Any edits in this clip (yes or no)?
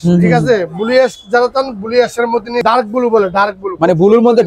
yes